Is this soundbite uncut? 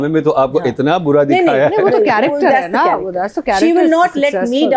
yes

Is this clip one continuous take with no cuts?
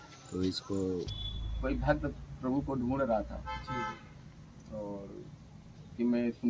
no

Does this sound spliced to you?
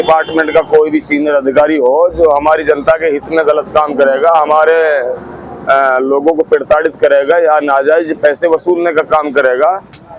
no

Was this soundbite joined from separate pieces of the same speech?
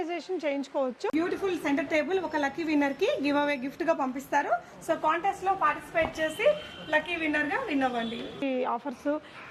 yes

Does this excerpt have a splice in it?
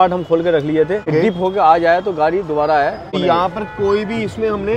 yes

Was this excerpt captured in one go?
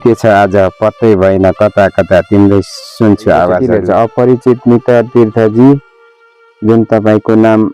no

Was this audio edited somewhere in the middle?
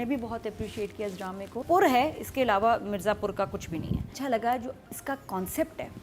yes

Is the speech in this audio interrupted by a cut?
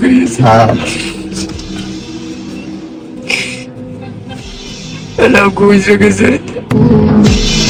no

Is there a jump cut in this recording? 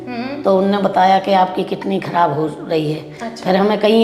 no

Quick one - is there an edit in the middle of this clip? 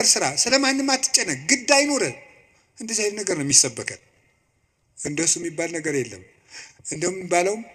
no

